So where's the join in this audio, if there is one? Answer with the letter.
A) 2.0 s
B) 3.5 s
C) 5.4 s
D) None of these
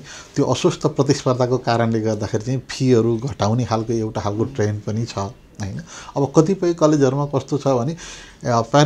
D